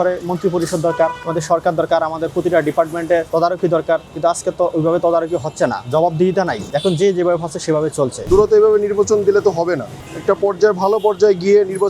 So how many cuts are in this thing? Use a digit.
5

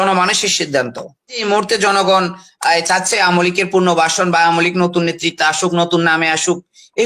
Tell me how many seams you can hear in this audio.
1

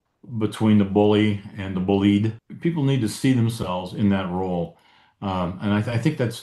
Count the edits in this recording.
1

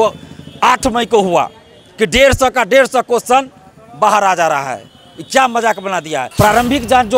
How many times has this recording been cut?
1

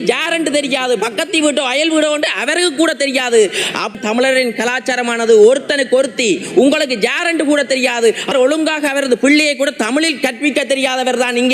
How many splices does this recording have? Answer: 2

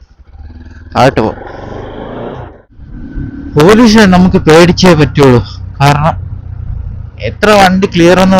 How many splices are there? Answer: 1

